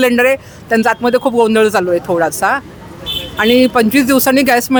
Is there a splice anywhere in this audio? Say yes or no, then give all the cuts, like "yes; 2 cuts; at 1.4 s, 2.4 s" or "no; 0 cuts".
no; 0 cuts